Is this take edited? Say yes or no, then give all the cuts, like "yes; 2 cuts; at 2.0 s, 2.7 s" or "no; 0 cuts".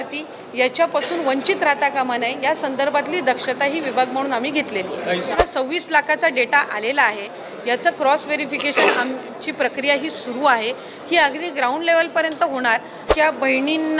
yes; 2 cuts; at 5.3 s, 13.0 s